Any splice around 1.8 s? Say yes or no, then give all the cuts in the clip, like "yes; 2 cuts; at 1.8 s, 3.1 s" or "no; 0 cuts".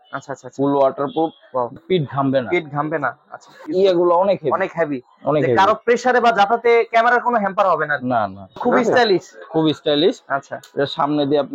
yes; 3 cuts; at 1.8 s, 3.6 s, 8.6 s